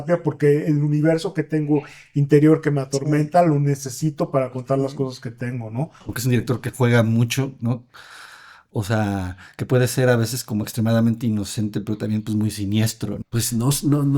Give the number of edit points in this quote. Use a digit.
2